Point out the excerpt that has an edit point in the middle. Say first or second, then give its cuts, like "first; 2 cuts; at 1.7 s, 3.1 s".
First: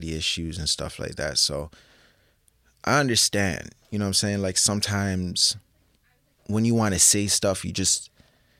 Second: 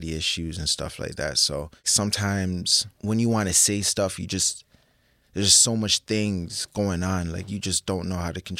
second; 2 cuts; at 1.9 s, 2.8 s